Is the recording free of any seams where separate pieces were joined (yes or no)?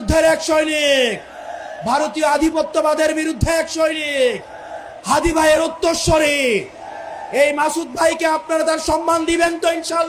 yes